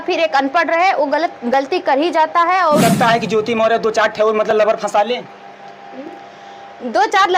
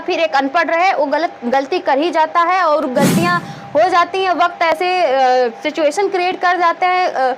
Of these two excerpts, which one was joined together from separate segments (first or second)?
first